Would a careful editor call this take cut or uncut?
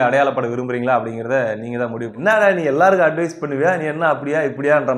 cut